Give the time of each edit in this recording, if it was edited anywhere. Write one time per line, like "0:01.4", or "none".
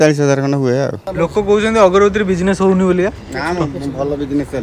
0:01.0